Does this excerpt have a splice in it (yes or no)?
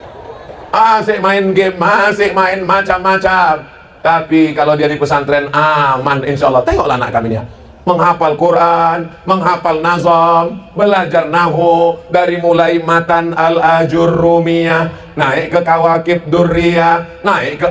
no